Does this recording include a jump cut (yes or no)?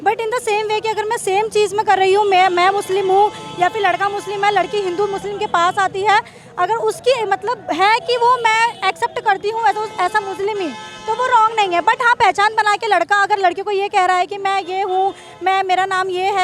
no